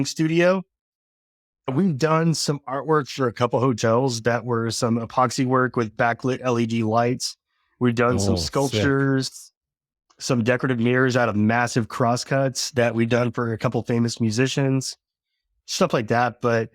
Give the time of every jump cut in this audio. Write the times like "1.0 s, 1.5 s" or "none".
1.7 s